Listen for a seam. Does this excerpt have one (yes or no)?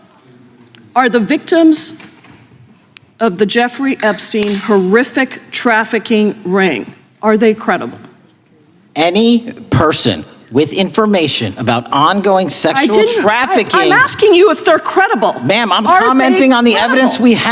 no